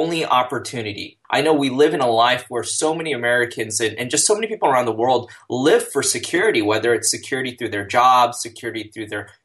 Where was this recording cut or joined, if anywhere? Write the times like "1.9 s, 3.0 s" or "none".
1.1 s